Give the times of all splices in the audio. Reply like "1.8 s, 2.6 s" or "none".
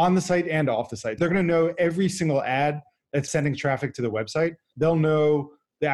1.2 s, 3.3 s, 4.7 s